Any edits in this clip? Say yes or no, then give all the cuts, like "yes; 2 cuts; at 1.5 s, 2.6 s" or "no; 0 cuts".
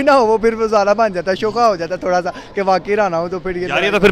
no; 0 cuts